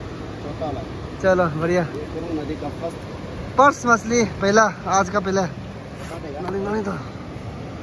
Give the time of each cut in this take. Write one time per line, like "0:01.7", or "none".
none